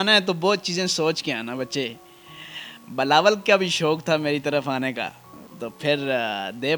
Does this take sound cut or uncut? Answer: uncut